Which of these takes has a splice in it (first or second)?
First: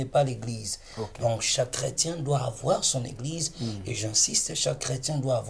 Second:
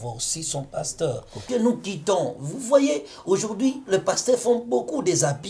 second